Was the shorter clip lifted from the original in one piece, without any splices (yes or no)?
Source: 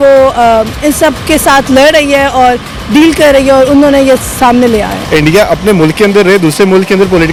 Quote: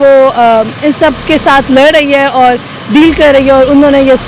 yes